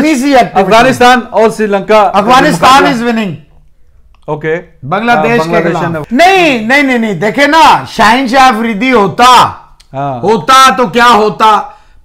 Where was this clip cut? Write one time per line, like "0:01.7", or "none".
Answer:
0:06.0